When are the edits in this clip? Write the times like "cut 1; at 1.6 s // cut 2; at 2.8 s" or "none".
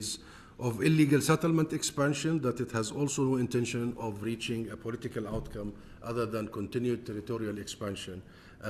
none